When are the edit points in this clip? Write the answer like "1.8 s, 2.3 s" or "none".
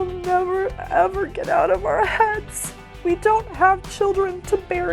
2.9 s